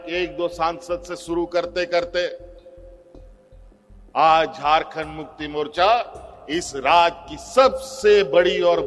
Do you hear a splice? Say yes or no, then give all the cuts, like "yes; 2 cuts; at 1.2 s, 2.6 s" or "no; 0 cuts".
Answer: no; 0 cuts